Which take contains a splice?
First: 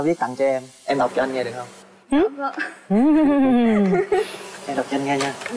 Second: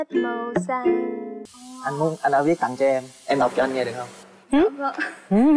second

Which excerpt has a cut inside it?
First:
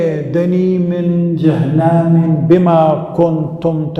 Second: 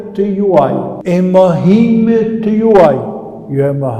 second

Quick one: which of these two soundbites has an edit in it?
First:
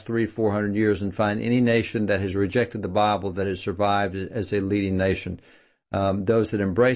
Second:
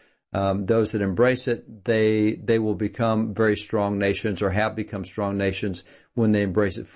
first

